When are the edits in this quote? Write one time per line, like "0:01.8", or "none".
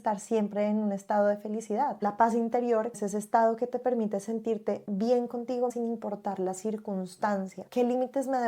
0:02.0
0:03.0
0:05.7
0:07.6